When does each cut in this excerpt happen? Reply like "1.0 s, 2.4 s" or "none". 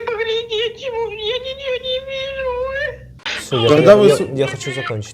3.1 s